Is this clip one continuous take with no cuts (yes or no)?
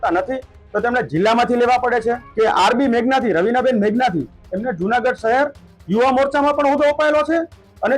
no